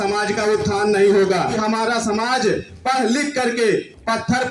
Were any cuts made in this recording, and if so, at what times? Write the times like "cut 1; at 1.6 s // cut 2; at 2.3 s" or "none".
cut 1; at 1.6 s